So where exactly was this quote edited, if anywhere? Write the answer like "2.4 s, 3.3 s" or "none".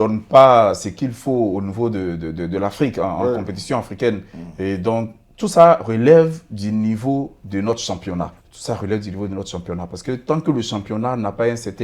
8.5 s